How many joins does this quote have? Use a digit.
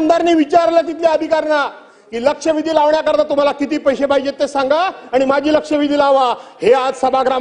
0